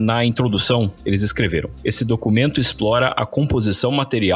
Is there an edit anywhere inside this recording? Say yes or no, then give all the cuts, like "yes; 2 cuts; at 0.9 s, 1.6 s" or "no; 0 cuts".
yes; 1 cut; at 1.0 s